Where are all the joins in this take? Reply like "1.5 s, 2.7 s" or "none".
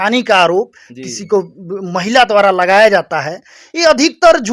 none